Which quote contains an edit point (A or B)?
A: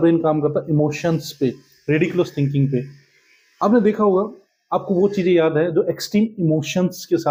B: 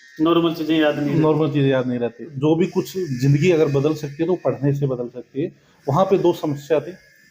B